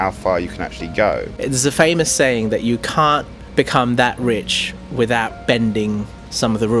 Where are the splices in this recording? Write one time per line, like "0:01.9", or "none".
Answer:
0:01.3
0:03.4